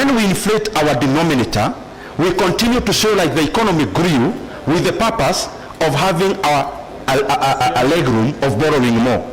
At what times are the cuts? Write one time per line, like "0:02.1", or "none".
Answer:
none